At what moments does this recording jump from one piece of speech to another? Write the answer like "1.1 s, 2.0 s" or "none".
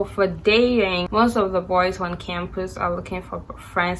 1.1 s